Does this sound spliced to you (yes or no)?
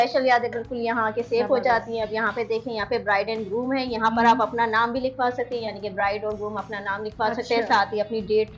no